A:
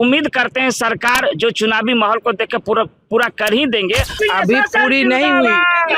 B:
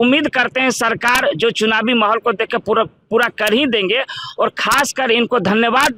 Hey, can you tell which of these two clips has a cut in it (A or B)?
A